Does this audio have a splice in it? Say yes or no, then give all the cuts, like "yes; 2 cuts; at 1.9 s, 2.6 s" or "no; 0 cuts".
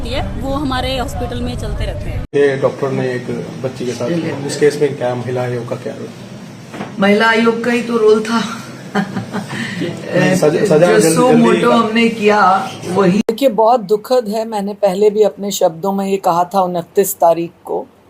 yes; 2 cuts; at 2.1 s, 13.3 s